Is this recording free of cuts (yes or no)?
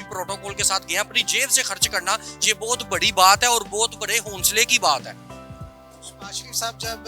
yes